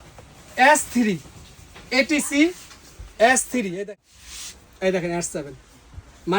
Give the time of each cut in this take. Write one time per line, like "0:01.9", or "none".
0:03.9